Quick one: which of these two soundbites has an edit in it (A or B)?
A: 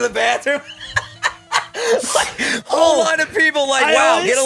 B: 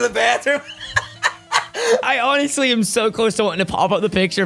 B